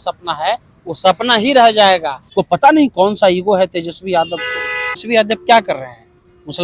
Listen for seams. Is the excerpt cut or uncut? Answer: cut